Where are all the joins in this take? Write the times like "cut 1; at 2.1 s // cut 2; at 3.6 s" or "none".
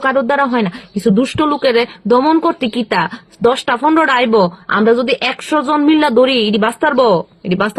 none